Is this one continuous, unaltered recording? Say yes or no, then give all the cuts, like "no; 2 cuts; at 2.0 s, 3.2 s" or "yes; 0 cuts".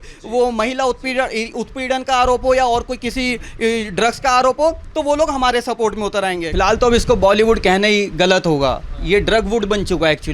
no; 1 cut; at 6.4 s